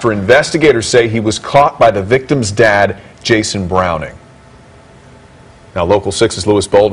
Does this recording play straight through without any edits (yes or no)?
no